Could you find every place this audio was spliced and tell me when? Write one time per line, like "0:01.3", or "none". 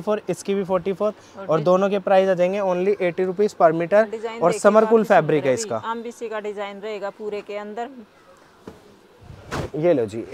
none

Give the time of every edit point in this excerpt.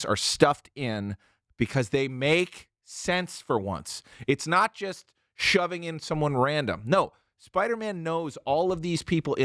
none

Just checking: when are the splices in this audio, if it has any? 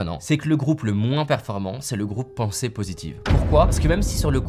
none

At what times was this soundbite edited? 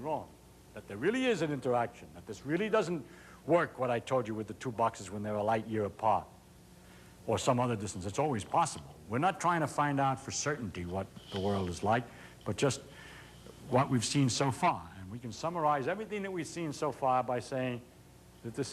0:03.4

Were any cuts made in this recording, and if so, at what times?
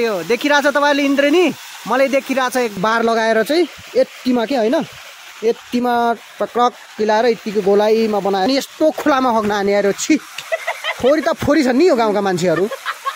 0:02.8
0:08.5

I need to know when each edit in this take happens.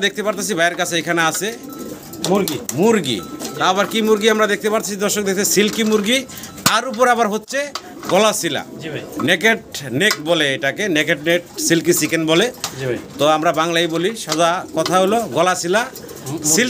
none

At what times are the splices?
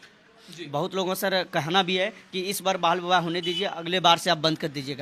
none

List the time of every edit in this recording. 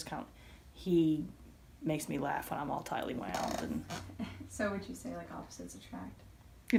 none

